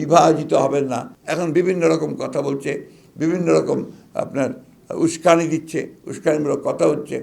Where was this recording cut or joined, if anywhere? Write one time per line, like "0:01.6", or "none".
0:01.1